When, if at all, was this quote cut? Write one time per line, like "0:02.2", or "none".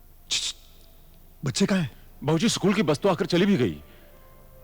0:02.0